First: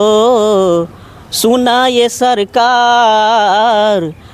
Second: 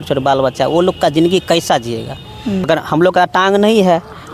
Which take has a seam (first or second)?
second